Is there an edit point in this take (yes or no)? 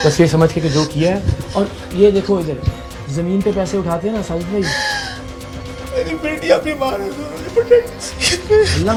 no